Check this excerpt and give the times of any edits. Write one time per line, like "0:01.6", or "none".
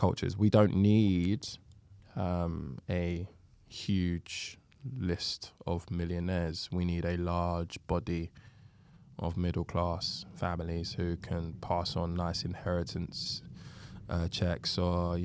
none